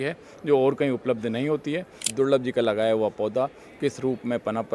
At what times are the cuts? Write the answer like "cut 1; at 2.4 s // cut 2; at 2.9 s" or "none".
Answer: cut 1; at 2.0 s